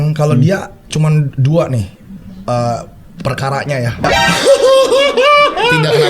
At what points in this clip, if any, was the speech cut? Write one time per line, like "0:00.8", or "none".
0:04.0